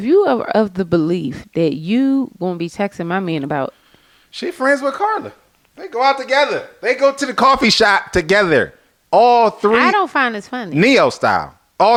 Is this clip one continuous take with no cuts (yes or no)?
yes